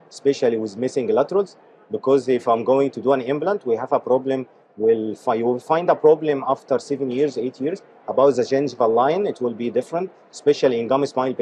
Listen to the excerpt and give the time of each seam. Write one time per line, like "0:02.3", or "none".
none